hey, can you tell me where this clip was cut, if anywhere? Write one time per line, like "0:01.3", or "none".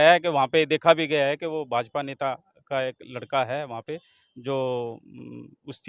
none

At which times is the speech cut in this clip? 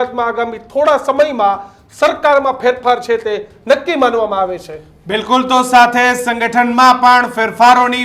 none

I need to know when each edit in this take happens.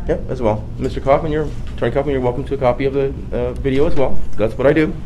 none

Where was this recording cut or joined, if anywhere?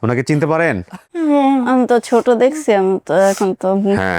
0:01.0

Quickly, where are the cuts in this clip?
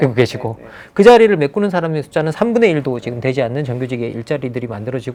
none

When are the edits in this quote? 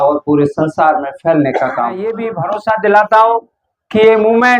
0:02.3

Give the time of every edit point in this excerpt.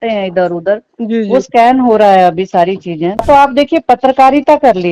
0:03.2

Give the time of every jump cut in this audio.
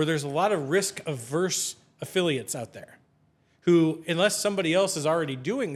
none

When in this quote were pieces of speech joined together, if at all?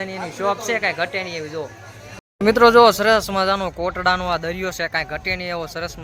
0:02.1

